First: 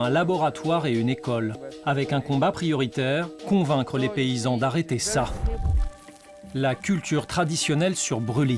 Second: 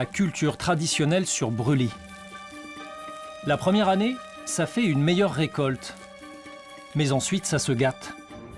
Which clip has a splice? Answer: first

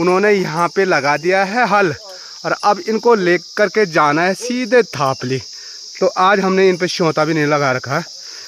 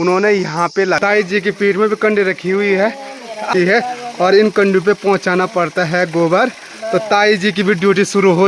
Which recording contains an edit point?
second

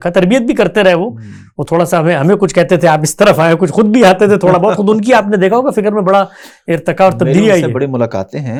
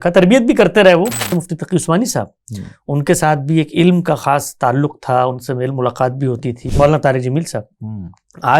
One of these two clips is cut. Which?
second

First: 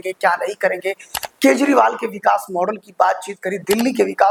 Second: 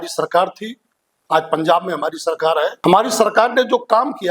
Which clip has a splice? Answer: second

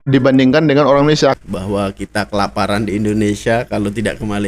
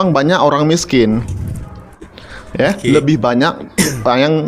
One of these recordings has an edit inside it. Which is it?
first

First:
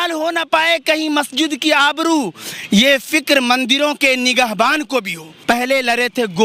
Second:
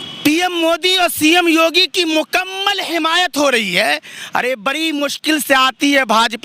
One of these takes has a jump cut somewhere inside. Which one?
first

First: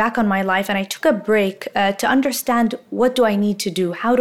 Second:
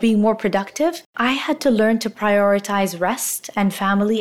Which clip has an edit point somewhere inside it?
second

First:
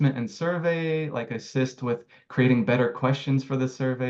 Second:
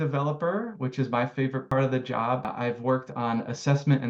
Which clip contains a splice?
second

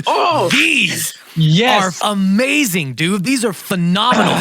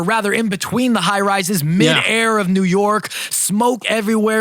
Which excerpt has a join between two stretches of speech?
first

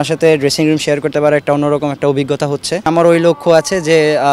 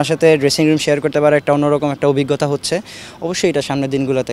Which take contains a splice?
first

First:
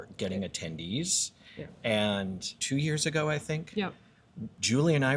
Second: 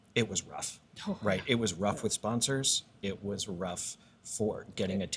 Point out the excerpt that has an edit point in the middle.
first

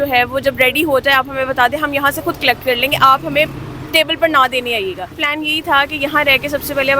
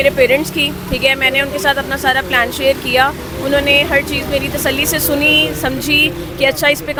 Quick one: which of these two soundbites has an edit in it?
first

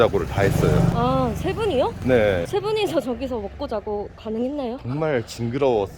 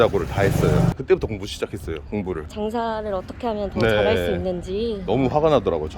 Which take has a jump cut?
second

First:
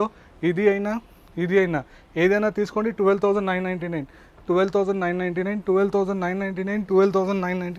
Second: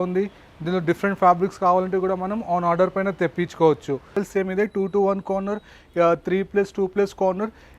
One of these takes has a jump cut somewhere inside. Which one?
second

